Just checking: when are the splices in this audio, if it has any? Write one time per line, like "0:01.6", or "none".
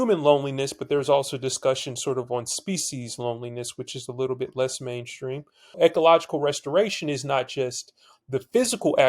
0:05.8